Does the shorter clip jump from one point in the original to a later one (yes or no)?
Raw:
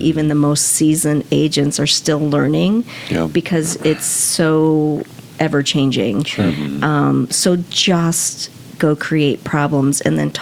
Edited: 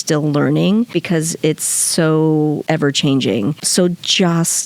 yes